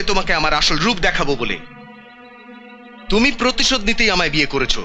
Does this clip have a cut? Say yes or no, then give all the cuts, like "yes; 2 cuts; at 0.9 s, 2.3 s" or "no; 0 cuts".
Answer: no; 0 cuts